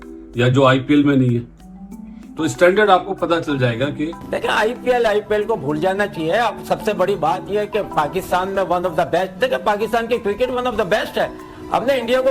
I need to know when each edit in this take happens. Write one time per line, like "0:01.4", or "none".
0:04.3